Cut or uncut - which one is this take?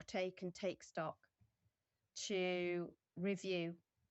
cut